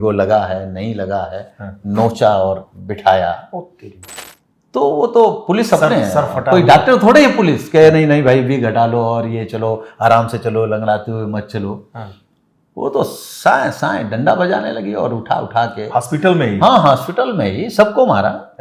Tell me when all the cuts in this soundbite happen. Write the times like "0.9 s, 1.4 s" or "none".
none